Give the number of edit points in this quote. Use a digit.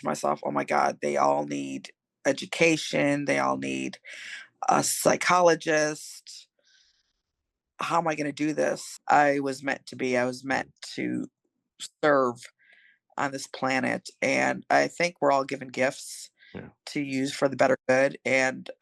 1